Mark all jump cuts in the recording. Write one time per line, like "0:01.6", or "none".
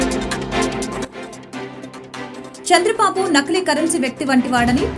none